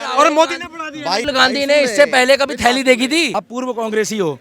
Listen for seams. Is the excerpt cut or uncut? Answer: cut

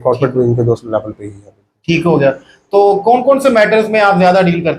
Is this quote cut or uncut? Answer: uncut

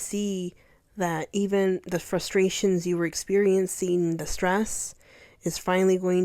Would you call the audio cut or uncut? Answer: uncut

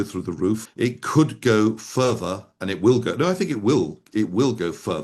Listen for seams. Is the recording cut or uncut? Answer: uncut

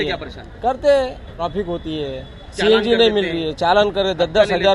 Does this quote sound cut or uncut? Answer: cut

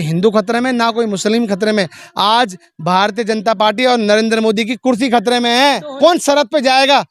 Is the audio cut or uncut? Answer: cut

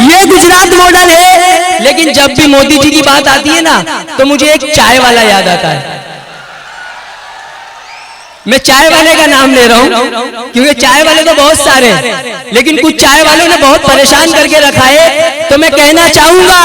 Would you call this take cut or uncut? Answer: uncut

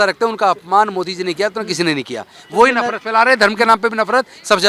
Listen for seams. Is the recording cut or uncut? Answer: uncut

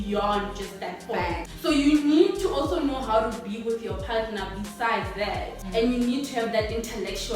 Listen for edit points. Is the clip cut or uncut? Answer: cut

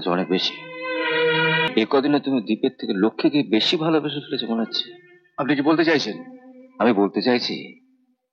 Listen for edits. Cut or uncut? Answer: cut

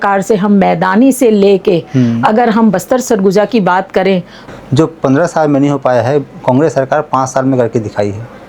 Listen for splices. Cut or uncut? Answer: cut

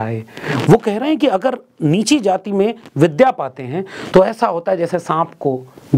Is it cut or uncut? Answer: uncut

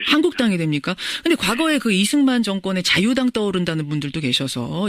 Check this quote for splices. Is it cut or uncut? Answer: uncut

